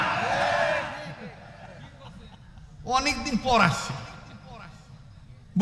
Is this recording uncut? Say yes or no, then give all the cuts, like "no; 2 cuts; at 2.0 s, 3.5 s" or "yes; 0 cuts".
yes; 0 cuts